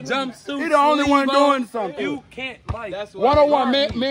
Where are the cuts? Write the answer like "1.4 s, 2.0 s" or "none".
1.9 s

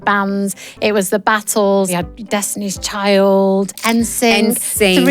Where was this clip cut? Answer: 1.9 s, 3.8 s

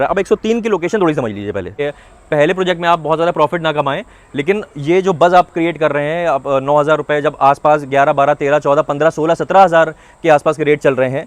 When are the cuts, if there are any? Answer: 1.7 s

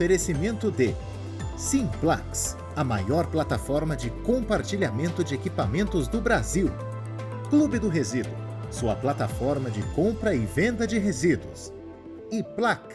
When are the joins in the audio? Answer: none

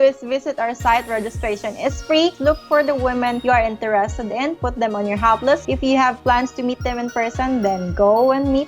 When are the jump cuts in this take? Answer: 2.4 s, 3.4 s, 5.6 s

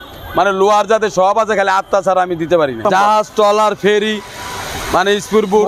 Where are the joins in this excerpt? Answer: 2.8 s

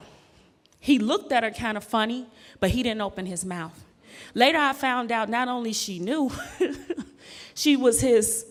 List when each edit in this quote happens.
none

